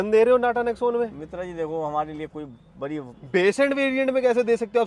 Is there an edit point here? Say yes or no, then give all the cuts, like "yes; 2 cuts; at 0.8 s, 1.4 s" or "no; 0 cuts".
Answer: no; 0 cuts